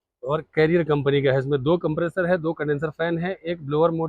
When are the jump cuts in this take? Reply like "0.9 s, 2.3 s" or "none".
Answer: none